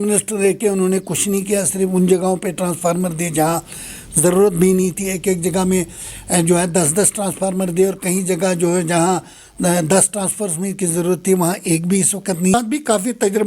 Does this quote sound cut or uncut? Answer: cut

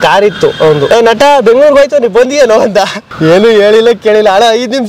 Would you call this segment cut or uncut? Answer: cut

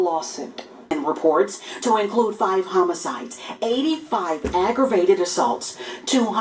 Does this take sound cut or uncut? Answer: cut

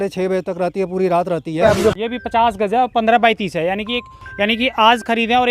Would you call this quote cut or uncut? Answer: cut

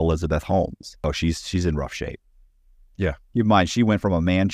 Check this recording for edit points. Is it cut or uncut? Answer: cut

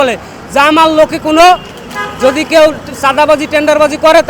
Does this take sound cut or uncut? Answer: uncut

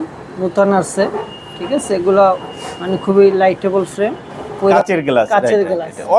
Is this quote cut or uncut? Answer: cut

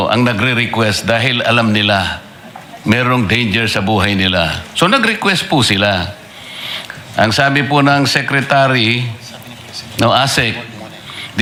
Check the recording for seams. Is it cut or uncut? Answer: uncut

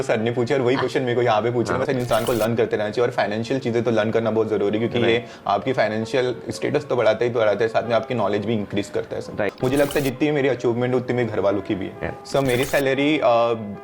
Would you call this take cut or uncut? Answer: cut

